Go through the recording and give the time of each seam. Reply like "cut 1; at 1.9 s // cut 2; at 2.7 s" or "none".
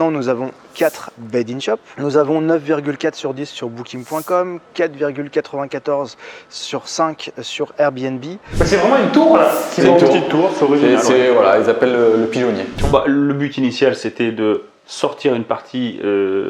cut 1; at 1.9 s // cut 2; at 8.5 s // cut 3; at 12.8 s